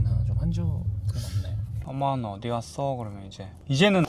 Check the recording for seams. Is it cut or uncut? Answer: uncut